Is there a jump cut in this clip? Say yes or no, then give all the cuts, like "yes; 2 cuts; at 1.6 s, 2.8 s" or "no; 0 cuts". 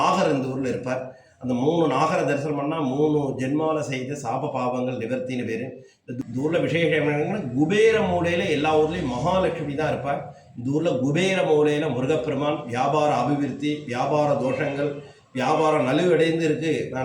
yes; 1 cut; at 6.1 s